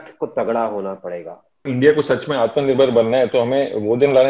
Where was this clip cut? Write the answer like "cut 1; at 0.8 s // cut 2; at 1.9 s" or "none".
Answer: cut 1; at 1.7 s